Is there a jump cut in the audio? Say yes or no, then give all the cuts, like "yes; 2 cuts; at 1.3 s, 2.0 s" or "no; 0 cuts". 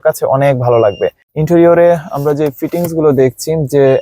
yes; 1 cut; at 1.2 s